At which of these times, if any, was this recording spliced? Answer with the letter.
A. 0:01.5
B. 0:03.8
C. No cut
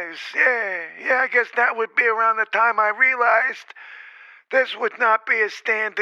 C